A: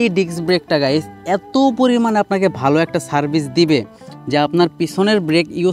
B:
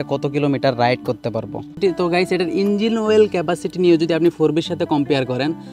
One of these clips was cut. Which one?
B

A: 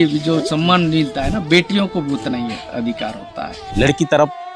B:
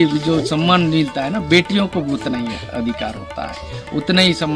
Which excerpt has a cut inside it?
A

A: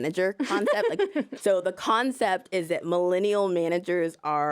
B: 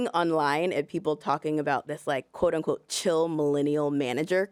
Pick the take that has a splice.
A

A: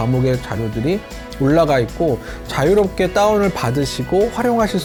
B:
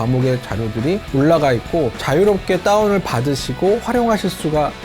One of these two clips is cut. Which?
B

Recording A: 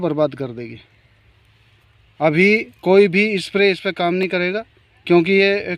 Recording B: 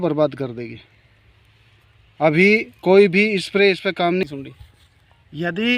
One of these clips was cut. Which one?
B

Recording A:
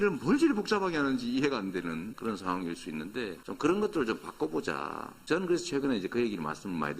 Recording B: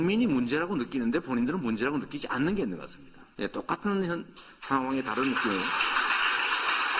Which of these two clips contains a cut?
A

